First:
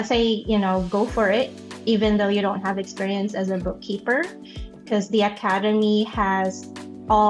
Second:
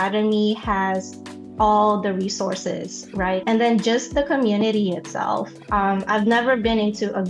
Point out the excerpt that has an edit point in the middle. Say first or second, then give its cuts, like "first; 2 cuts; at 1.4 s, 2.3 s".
second; 1 cut; at 3.4 s